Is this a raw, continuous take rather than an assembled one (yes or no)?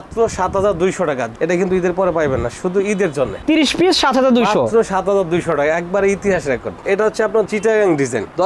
no